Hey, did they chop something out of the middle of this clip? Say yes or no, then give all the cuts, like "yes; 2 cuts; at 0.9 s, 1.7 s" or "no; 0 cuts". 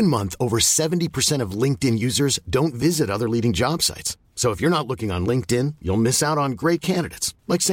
no; 0 cuts